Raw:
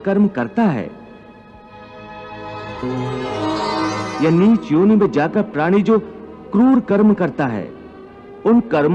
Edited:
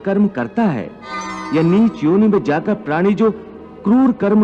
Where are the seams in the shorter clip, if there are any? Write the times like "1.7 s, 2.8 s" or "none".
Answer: 1.3 s

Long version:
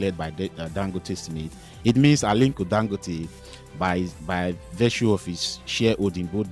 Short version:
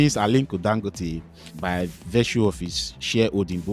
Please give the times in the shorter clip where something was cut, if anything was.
1.5 s

